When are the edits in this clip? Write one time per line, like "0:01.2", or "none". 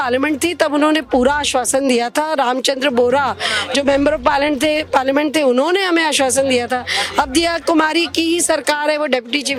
none